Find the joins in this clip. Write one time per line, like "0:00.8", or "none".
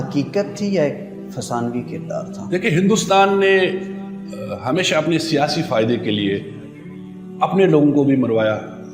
none